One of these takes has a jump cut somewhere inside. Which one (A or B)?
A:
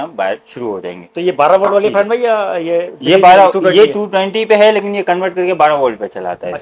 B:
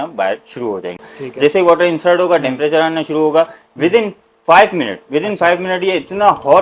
B